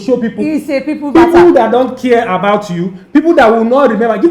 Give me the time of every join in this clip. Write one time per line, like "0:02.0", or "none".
none